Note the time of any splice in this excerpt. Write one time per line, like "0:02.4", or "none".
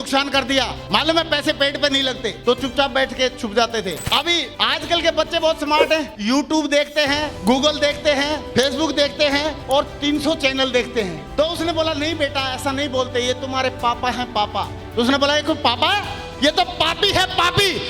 0:04.0
0:11.2